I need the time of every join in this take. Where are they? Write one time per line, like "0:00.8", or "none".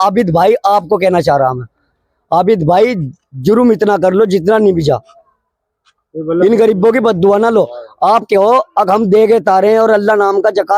none